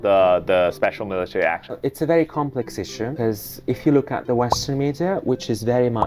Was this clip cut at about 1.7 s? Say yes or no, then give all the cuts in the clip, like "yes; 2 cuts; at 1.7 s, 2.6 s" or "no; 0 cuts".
yes; 2 cuts; at 1.7 s, 3.1 s